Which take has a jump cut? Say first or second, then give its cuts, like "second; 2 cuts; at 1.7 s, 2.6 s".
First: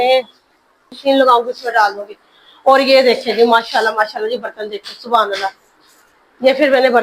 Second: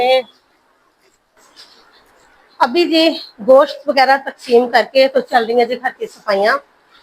first; 1 cut; at 1.0 s